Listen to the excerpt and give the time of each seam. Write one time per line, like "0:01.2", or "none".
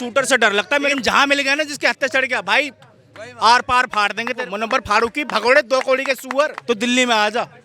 0:00.9
0:04.4
0:06.6